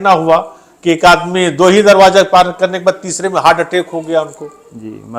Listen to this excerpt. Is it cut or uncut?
uncut